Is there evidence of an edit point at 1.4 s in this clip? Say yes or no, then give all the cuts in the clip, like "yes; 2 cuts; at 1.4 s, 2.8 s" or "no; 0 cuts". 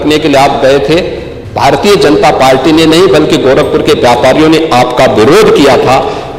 no; 0 cuts